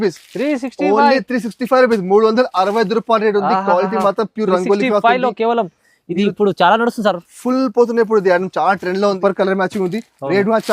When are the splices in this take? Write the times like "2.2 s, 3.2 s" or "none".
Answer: 9.2 s